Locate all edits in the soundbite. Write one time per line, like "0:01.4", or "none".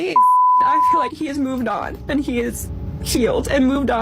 0:00.9